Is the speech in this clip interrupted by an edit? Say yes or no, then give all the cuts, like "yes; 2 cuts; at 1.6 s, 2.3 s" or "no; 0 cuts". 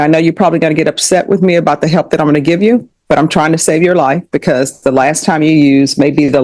no; 0 cuts